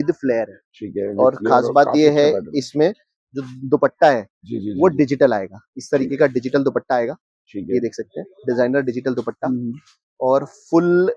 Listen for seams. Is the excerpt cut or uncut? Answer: uncut